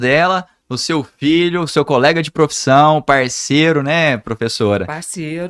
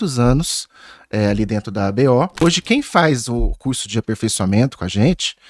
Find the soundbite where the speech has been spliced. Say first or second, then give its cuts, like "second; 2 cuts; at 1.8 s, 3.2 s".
second; 1 cut; at 2.4 s